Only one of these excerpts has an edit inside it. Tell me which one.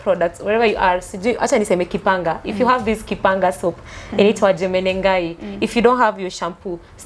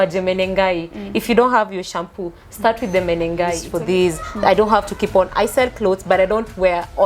second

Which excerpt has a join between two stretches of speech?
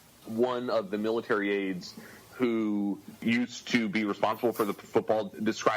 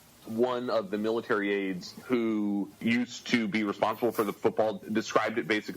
second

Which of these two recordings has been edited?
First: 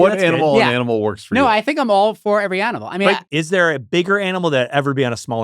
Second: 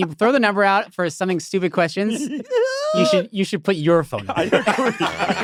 first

